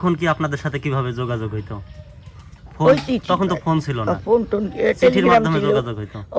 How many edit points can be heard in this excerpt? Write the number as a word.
one